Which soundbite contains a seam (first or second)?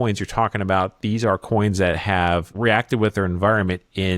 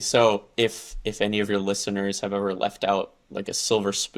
first